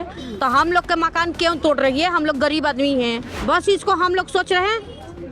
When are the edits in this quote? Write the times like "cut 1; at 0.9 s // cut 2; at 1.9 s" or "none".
cut 1; at 3.3 s